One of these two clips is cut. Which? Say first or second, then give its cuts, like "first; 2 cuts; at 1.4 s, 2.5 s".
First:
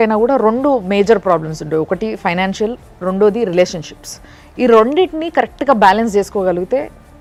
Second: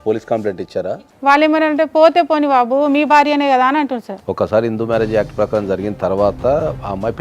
second; 2 cuts; at 0.9 s, 4.1 s